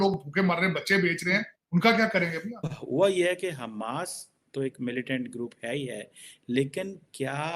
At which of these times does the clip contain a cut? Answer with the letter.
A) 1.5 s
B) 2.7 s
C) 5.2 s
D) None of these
B